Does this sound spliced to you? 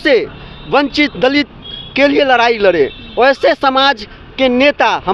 no; 0 cuts

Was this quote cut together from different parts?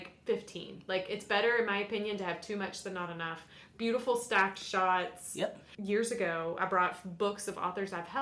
yes; 1 cut; at 5.7 s

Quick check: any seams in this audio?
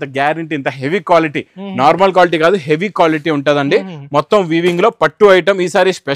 no; 0 cuts

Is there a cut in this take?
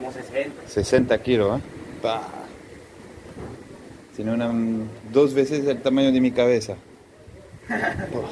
no; 0 cuts

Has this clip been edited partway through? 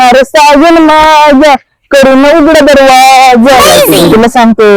yes; 1 cut; at 3.7 s

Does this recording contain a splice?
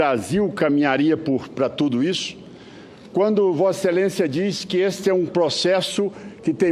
no; 0 cuts

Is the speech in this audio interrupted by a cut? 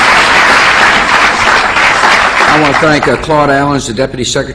no; 0 cuts

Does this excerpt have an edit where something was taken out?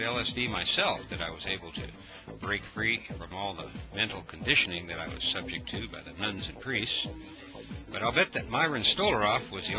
yes; 1 cut; at 7.9 s

